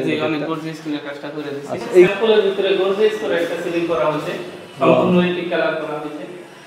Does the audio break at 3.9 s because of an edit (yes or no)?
no